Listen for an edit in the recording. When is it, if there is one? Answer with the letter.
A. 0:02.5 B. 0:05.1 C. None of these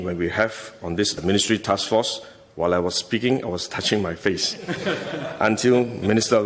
C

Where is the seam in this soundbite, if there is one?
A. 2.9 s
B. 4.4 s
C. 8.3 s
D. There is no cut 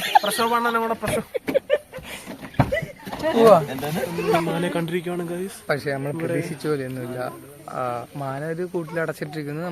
B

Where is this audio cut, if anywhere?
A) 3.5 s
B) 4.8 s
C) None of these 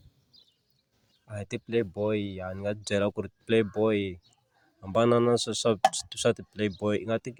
C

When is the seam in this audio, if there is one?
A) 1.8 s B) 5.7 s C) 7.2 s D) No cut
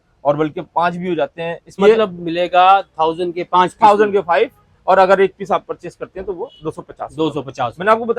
A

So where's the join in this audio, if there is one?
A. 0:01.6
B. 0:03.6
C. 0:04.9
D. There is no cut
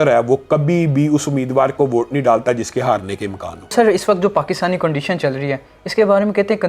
B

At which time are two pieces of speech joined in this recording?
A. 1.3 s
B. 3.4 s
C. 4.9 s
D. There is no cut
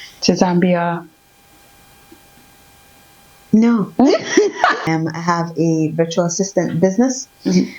C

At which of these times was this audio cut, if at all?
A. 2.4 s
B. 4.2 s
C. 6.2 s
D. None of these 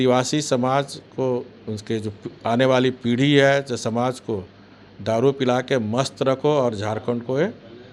D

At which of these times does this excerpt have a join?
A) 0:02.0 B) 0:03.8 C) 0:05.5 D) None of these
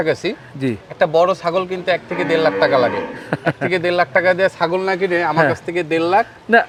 D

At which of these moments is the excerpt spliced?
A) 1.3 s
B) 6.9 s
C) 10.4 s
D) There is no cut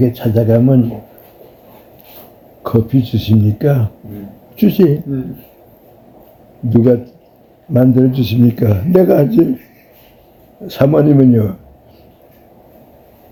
D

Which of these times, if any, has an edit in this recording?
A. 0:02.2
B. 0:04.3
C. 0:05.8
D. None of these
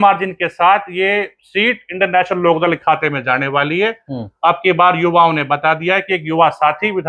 D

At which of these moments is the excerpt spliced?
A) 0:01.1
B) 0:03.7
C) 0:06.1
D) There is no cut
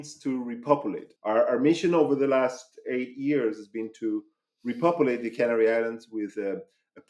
A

